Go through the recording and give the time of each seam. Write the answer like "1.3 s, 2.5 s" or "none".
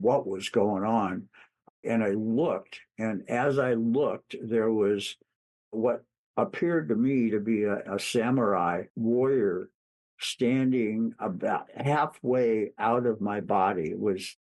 7.9 s, 8.9 s

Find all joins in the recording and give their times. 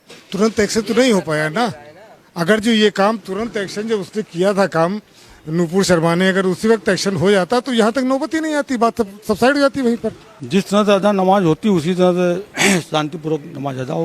10.3 s

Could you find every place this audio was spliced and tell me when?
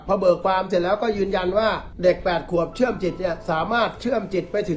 1.9 s

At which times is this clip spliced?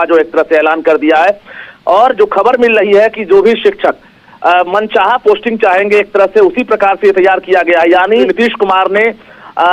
8.2 s

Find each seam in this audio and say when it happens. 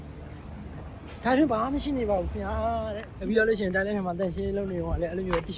3.1 s

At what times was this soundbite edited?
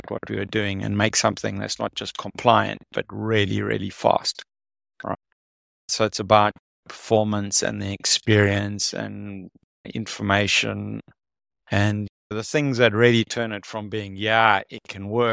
none

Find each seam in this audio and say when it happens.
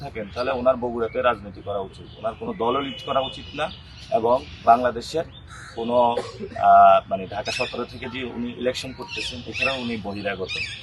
none

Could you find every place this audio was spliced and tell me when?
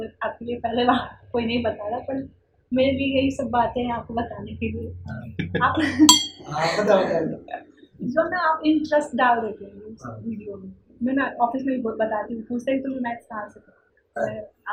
none

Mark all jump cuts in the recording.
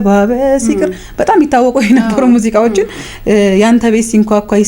none

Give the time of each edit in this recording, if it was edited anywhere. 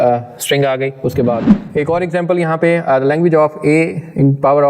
1.5 s

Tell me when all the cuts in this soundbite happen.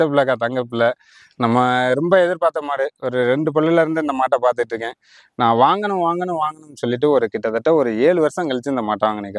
none

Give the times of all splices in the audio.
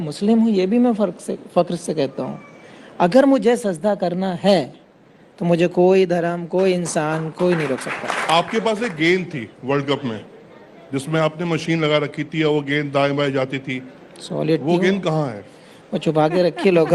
8.2 s

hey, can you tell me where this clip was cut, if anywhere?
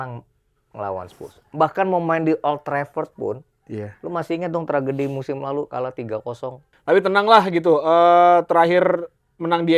6.7 s

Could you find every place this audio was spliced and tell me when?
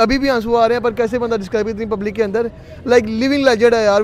none

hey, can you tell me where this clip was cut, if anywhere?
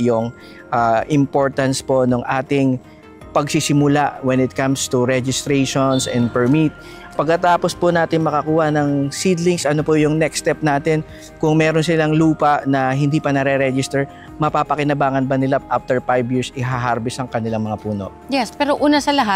none

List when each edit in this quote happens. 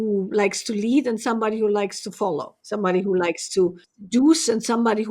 2.6 s, 3.9 s

